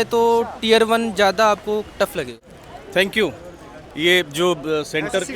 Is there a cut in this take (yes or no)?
yes